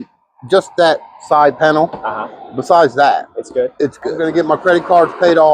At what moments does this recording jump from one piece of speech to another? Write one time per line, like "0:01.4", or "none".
0:04.2